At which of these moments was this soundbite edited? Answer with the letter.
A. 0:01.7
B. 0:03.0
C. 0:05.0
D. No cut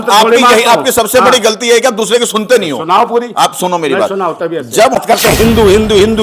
C